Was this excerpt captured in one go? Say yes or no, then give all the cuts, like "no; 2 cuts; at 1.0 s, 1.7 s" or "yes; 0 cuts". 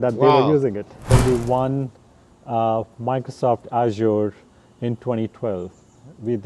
no; 1 cut; at 1.1 s